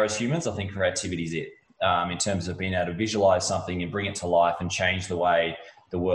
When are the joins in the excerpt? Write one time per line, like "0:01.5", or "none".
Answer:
none

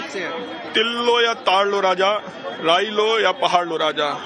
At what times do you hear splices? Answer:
0:03.0

